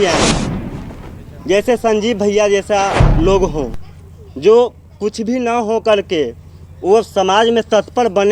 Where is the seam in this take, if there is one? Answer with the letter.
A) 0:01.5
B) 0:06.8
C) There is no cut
C